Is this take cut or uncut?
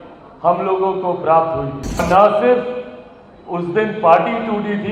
cut